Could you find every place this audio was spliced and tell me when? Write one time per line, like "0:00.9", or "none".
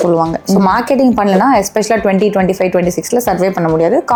none